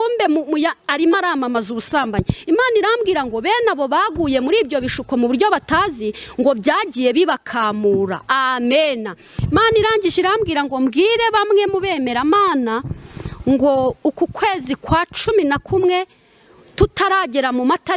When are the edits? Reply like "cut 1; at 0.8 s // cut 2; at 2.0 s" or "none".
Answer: cut 1; at 9.3 s